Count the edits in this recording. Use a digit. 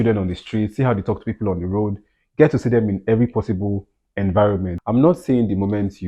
1